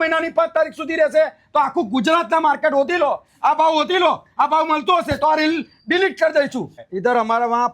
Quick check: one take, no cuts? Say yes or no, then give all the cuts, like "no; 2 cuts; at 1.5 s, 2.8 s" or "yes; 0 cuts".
no; 1 cut; at 6.8 s